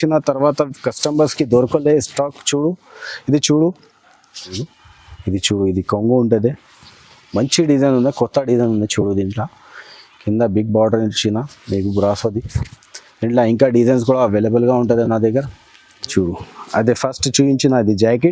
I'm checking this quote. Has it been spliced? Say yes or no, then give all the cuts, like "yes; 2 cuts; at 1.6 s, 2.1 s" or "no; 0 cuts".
yes; 2 cuts; at 4.6 s, 16.1 s